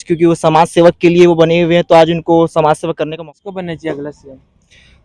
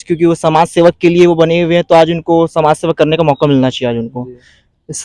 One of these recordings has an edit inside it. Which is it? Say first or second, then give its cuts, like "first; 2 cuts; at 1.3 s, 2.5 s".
first; 1 cut; at 3.2 s